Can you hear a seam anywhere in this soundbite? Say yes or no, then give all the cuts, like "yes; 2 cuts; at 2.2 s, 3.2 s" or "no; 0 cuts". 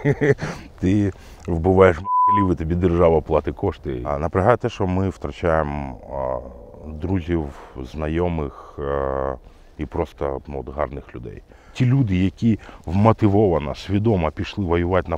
yes; 2 cuts; at 4.1 s, 11.7 s